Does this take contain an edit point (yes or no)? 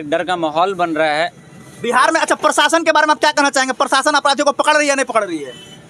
no